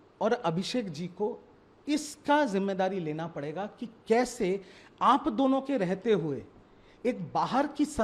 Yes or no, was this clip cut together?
no